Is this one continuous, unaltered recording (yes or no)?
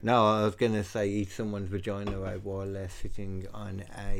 yes